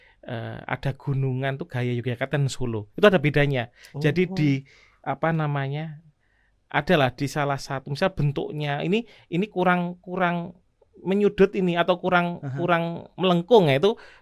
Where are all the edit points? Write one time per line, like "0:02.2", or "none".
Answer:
none